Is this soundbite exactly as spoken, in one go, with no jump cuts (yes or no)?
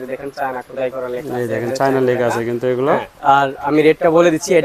yes